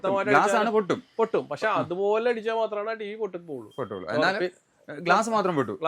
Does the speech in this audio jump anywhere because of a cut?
no; 0 cuts

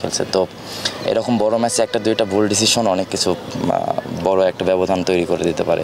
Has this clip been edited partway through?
no; 0 cuts

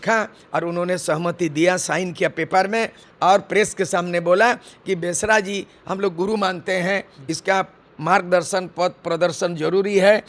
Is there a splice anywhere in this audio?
no; 0 cuts

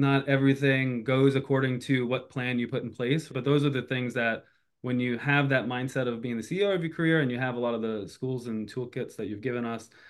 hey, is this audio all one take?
no; 1 cut; at 3.3 s

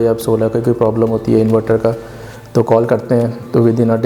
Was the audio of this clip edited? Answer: no; 0 cuts

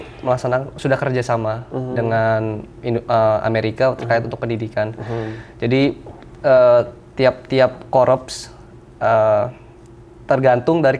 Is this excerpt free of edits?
yes; 0 cuts

